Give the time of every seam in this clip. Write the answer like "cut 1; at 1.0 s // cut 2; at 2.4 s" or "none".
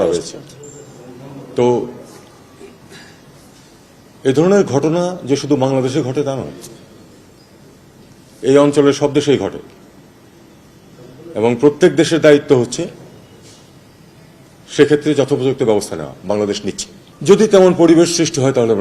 cut 1; at 17.1 s